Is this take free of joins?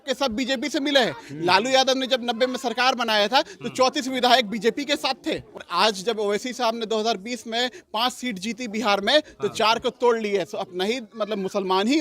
no; 1 cut; at 5.6 s

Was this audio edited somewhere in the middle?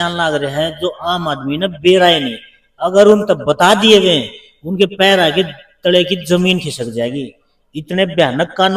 no; 0 cuts

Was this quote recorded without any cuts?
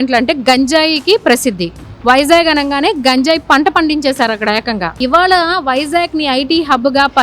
no; 1 cut; at 5.0 s

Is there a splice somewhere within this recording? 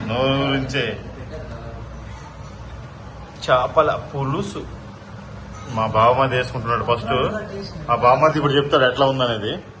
no; 0 cuts

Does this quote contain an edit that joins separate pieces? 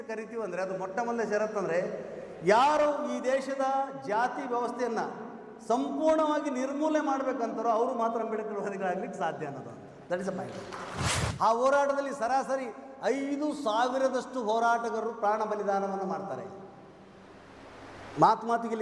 yes; 1 cut; at 11.3 s

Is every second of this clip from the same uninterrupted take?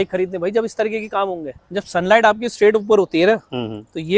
no; 1 cut; at 1.5 s

